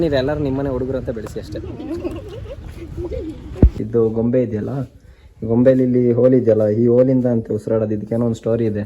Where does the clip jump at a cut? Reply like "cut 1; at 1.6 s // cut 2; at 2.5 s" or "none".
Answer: cut 1; at 3.8 s